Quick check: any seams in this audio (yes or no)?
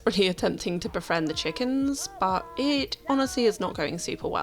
no